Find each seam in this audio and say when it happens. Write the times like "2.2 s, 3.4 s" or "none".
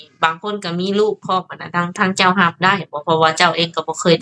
none